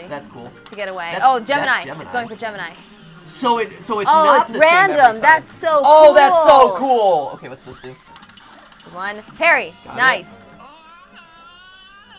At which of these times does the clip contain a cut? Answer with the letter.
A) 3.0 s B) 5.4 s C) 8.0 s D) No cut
C